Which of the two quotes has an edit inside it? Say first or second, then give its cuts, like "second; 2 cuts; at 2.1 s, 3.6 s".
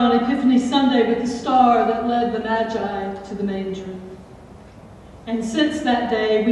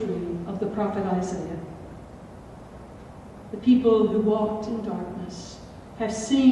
first; 1 cut; at 1.5 s